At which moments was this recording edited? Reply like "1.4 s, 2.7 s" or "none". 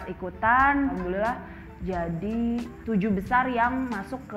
1.0 s